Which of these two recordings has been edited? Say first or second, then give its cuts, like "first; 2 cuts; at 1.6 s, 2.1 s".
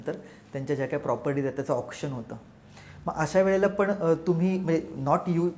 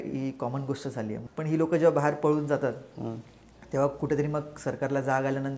second; 1 cut; at 1.2 s